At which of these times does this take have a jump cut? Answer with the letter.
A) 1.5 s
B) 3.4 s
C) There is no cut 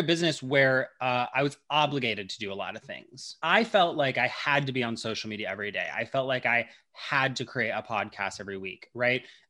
B